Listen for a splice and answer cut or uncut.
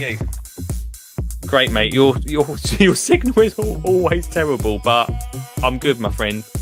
uncut